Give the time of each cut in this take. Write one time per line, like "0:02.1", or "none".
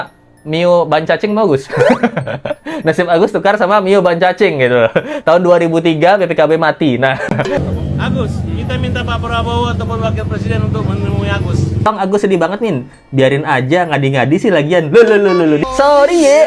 0:07.6
0:11.9
0:15.6